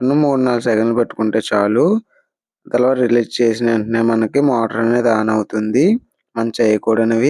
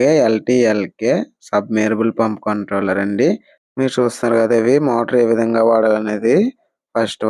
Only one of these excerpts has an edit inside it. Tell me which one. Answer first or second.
second